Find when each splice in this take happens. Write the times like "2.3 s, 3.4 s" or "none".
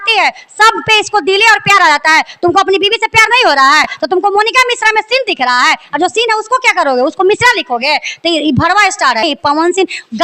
3.9 s, 9.2 s

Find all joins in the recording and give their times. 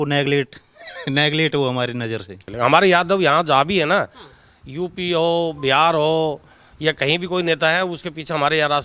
2.5 s

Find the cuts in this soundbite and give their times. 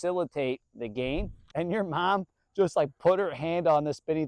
1.4 s

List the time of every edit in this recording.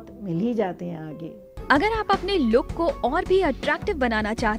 1.4 s

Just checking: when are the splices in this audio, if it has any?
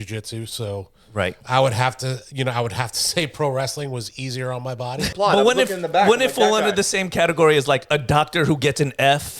5.0 s

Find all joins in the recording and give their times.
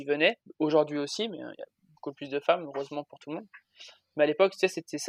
none

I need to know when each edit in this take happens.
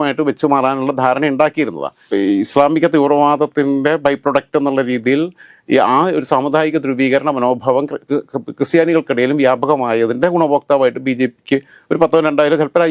2.1 s

